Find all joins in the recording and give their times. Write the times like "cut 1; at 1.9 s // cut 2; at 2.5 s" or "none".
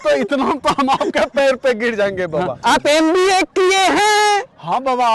cut 1; at 2.6 s